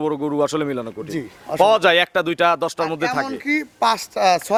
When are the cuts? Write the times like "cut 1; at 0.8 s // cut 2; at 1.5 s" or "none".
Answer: none